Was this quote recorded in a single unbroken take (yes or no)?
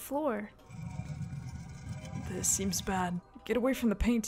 no